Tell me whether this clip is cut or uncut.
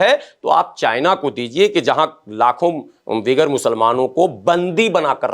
uncut